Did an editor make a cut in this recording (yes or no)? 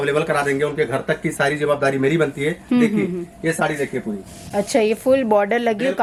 no